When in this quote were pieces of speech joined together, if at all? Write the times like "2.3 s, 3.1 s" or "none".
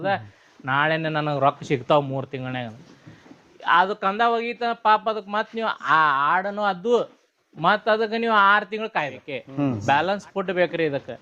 9.5 s

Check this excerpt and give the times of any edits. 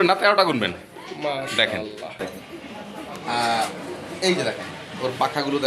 2.2 s

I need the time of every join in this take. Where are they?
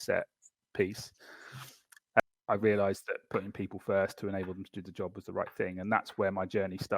2.2 s

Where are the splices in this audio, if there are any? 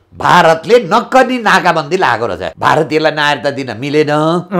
2.5 s

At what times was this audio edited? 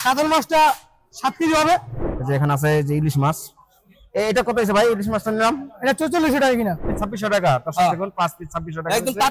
1.9 s, 6.9 s

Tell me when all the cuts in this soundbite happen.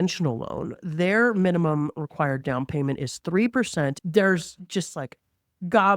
4.0 s

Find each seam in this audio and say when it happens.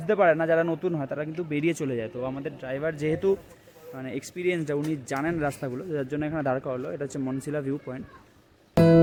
none

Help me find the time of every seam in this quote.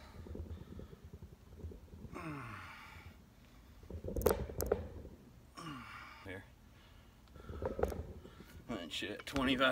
6.2 s

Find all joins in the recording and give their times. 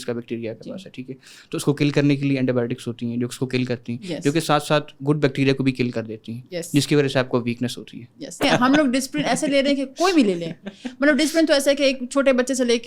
8.4 s

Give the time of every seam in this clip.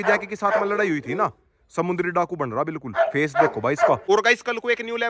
4.0 s

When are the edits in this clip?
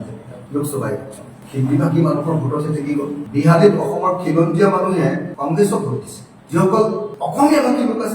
1.4 s, 3.2 s, 6.3 s

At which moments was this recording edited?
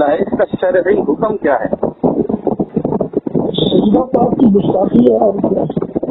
2.7 s

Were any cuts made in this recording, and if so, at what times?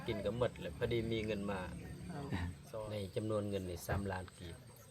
2.6 s

